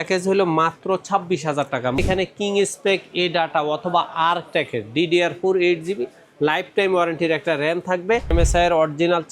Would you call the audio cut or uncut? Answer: cut